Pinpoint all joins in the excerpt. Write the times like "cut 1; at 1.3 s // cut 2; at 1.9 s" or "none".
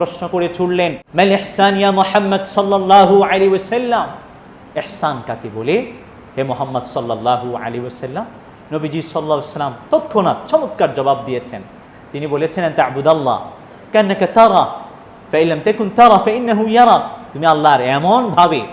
cut 1; at 1.0 s